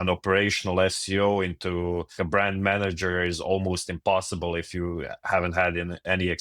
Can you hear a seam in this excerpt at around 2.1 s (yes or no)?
yes